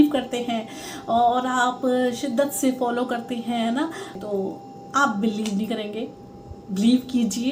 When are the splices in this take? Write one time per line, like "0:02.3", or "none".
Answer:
0:04.2